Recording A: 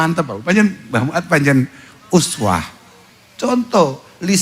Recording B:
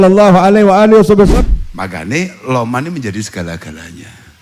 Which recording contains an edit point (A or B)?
B